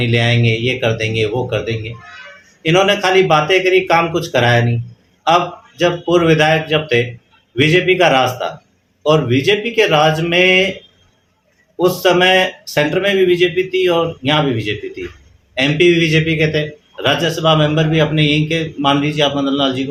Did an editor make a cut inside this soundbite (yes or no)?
no